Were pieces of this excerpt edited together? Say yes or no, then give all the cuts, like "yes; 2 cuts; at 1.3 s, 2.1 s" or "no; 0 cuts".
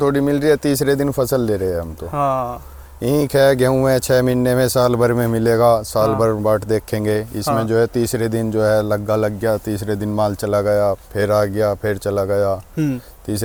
no; 0 cuts